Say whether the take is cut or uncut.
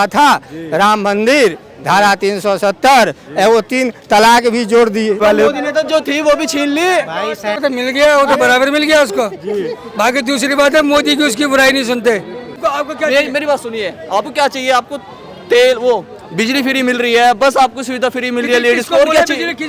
cut